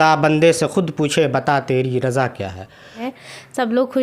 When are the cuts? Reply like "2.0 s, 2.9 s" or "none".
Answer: 3.1 s